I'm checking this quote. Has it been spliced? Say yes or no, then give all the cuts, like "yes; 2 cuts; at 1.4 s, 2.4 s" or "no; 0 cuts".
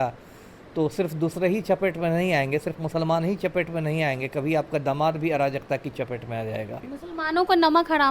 yes; 1 cut; at 6.9 s